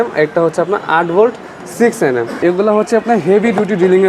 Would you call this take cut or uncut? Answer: cut